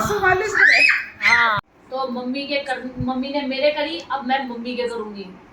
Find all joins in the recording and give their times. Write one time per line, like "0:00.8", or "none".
0:01.6